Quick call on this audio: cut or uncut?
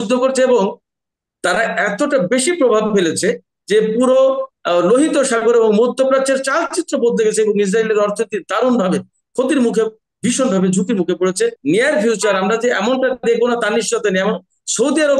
cut